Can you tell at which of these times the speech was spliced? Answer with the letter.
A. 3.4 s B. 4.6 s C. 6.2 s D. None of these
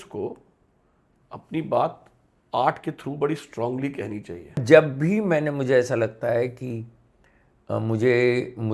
B